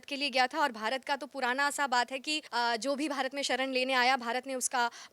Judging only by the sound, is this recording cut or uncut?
cut